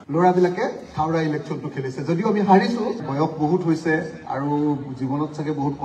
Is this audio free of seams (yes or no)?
no